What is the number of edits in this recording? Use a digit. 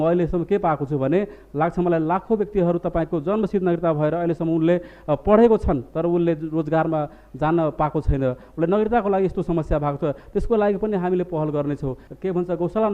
1